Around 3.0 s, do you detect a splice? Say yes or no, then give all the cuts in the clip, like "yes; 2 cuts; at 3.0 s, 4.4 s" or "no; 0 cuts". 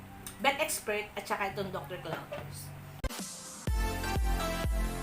yes; 1 cut; at 3.0 s